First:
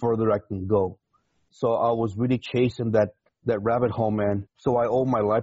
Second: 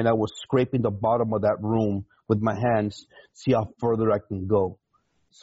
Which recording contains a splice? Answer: first; 2 cuts; at 3.3 s, 4.5 s

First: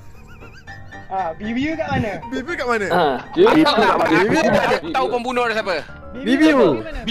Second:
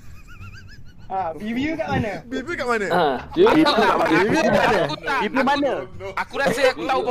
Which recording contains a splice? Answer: first; 1 cut; at 4.8 s

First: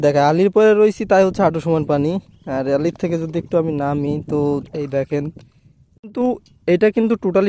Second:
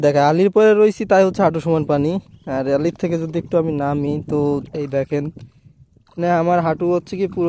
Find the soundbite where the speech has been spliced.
first; 1 cut; at 6.0 s

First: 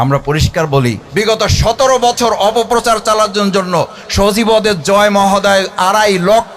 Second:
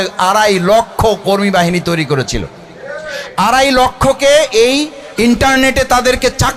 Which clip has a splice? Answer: first; 1 cut; at 1.0 s

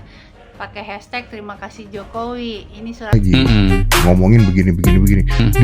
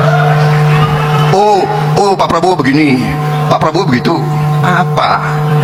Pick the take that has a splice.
first; 1 cut; at 3.1 s

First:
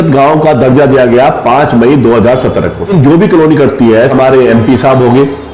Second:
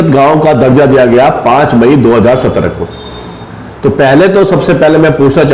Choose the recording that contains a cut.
first; 2 cuts; at 2.9 s, 4.1 s

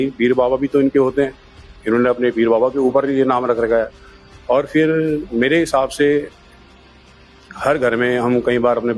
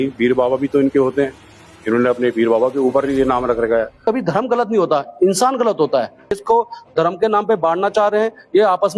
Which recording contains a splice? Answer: second; 2 cuts; at 4.0 s, 6.4 s

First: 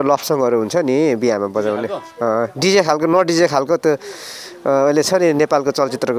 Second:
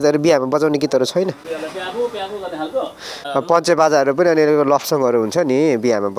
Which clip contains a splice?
second; 1 cut; at 3.1 s

